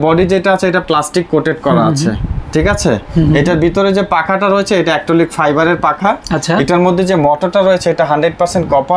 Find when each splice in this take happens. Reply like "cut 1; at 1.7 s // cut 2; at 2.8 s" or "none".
none